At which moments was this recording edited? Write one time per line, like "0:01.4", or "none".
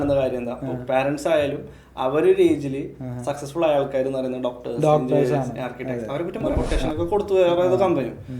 0:06.6